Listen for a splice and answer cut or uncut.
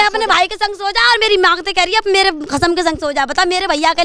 uncut